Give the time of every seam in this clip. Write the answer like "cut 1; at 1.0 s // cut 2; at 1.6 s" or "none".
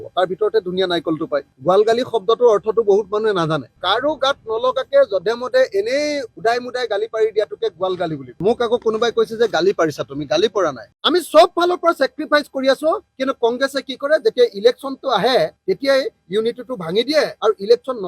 cut 1; at 1.5 s // cut 2; at 3.8 s // cut 3; at 8.3 s // cut 4; at 10.8 s